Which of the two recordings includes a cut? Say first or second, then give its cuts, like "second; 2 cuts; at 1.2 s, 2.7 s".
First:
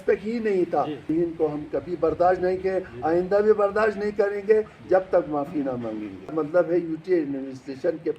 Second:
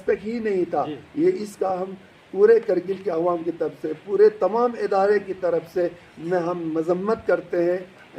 first; 2 cuts; at 1.1 s, 6.3 s